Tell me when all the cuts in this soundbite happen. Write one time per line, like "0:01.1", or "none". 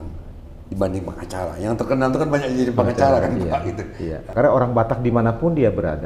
0:04.3